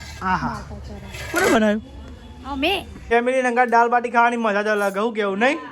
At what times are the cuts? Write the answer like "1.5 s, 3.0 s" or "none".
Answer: 3.1 s